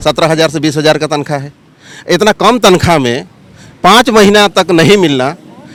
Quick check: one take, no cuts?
yes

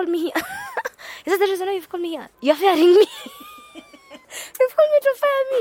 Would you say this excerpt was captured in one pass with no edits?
yes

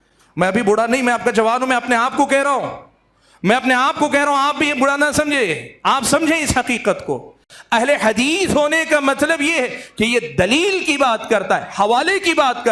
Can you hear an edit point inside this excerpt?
yes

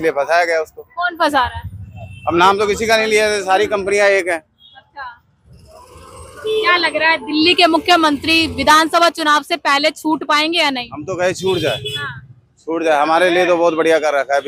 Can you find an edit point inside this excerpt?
no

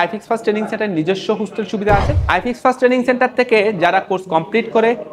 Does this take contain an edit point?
yes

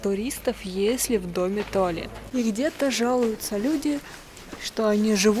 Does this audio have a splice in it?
yes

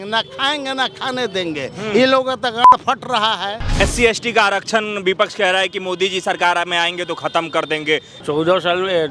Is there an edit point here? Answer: yes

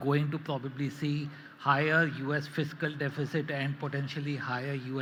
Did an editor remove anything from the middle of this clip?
no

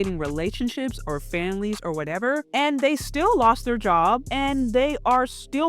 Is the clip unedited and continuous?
no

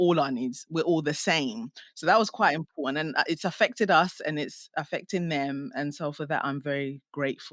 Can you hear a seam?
no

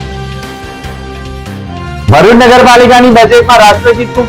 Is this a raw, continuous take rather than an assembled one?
no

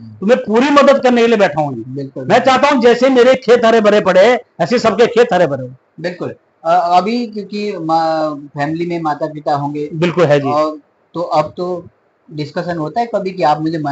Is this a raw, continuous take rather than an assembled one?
yes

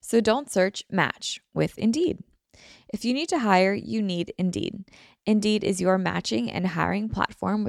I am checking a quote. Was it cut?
no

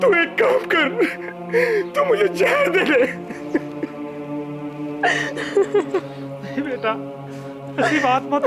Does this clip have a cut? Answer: no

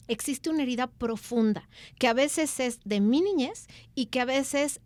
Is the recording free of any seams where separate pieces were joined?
yes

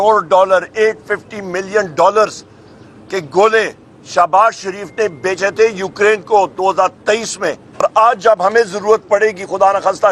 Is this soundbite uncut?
no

